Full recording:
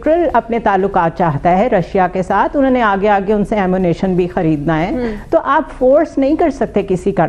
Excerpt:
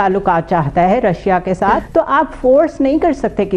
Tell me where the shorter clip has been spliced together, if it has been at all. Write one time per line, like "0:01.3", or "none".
0:01.8